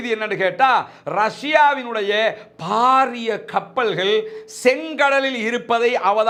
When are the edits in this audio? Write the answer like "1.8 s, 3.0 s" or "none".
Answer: none